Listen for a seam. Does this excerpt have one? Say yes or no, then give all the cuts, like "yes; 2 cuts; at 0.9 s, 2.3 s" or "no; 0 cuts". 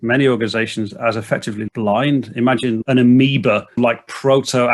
yes; 2 cuts; at 2.8 s, 3.8 s